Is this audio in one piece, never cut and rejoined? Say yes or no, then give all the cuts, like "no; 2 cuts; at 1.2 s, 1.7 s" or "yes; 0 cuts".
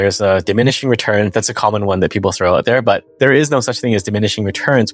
no; 1 cut; at 3.1 s